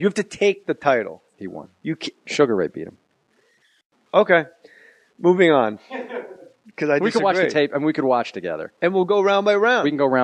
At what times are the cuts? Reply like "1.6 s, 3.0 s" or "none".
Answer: none